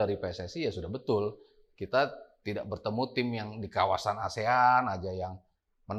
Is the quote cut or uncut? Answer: uncut